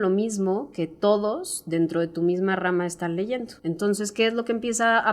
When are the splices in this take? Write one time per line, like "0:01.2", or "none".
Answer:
0:03.5